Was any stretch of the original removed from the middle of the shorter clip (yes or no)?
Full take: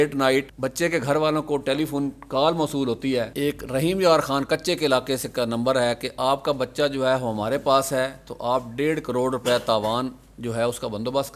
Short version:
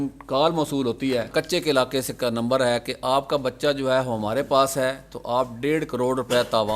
yes